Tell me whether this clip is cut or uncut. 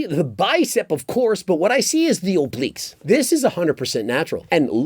cut